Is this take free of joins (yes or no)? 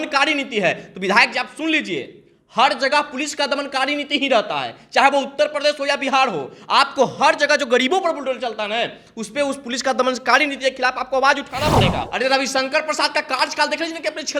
no